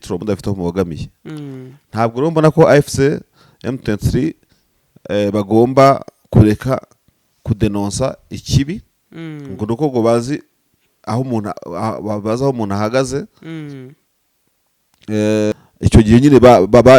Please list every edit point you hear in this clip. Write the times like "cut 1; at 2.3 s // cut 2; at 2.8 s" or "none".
cut 1; at 15.5 s